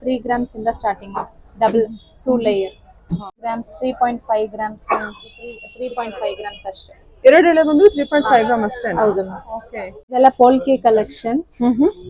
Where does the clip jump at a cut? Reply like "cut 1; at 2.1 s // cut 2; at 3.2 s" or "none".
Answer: cut 1; at 3.4 s // cut 2; at 5.6 s // cut 3; at 9.9 s